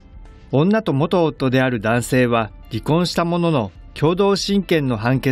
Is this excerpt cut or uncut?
cut